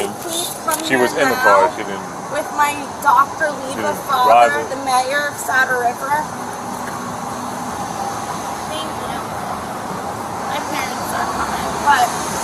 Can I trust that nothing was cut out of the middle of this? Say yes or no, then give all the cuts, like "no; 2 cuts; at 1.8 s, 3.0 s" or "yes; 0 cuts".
yes; 0 cuts